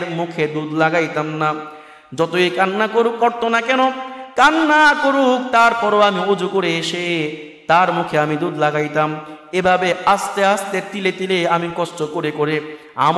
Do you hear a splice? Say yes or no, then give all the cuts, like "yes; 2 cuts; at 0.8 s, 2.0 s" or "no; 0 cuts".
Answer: no; 0 cuts